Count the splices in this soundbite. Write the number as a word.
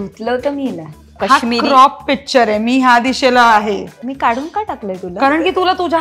two